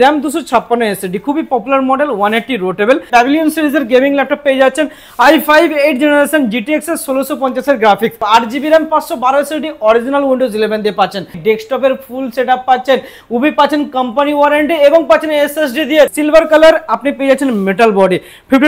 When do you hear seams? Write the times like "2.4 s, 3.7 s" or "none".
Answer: 3.1 s, 8.2 s, 11.4 s, 16.1 s